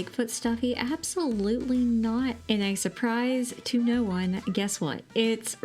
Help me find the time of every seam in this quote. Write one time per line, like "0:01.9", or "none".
0:02.4